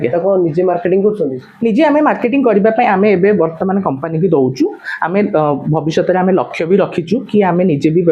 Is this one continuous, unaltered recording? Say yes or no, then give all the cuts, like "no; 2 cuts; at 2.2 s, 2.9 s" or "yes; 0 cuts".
yes; 0 cuts